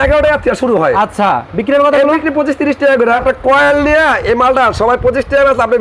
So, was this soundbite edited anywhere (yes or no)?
yes